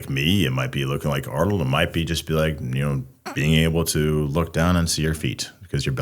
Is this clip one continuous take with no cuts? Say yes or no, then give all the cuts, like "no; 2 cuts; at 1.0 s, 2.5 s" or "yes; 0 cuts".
no; 1 cut; at 3.2 s